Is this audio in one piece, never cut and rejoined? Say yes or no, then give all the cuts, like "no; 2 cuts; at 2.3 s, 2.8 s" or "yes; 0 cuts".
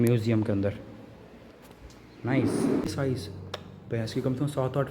no; 1 cut; at 2.8 s